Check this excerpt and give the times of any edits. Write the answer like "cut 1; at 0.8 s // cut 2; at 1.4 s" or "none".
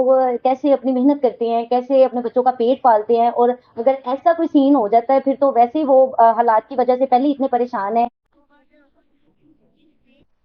none